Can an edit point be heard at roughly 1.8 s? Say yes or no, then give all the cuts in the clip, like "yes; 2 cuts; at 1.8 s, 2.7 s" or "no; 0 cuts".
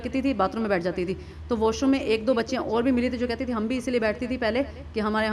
no; 0 cuts